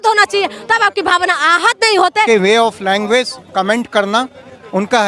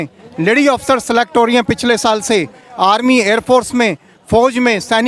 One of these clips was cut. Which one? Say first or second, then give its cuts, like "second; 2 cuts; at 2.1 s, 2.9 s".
first; 1 cut; at 2.3 s